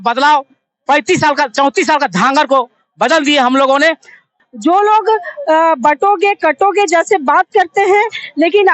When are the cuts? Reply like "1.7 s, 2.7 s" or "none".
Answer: 4.4 s